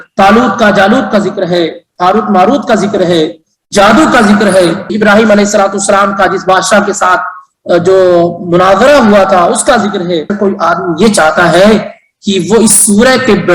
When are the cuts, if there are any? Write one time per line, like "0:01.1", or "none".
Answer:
0:04.9
0:10.3

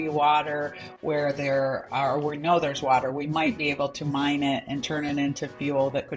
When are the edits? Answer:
none

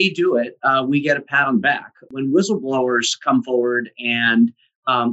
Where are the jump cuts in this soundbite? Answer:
0:02.1

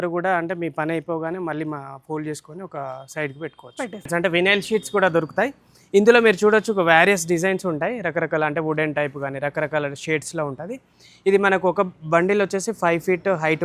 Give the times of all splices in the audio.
0:04.1

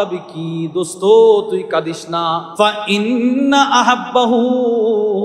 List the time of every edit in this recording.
0:02.5

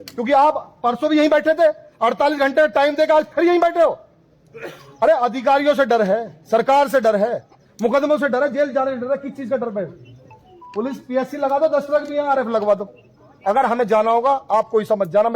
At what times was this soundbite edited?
none

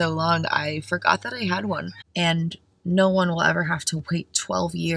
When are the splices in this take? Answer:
0:02.0

